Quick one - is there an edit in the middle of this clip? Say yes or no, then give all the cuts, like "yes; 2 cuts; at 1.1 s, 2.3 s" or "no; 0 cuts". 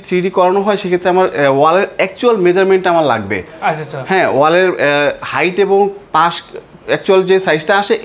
no; 0 cuts